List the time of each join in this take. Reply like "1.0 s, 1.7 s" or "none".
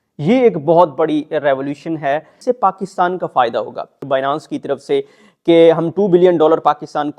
2.3 s, 4.0 s